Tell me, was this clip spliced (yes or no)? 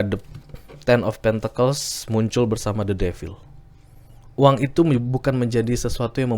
no